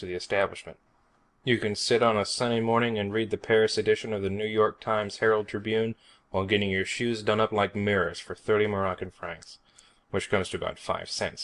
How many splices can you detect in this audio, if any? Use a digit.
1